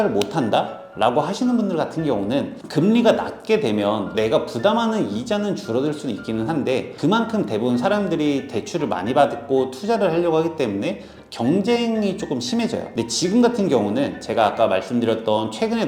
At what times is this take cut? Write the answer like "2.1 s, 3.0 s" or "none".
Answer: 2.6 s